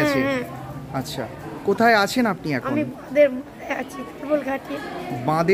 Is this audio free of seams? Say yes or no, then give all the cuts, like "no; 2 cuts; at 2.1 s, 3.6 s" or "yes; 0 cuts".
yes; 0 cuts